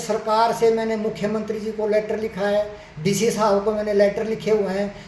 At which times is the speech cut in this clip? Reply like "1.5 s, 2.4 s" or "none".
none